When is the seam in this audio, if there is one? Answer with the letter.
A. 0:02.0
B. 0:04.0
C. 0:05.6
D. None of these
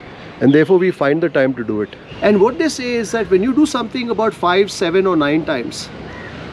A